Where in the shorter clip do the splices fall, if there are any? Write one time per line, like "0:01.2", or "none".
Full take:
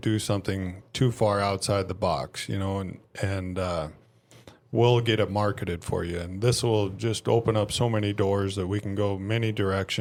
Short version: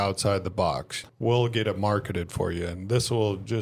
0:00.9